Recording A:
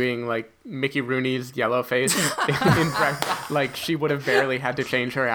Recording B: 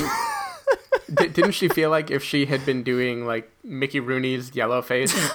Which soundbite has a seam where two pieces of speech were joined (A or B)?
B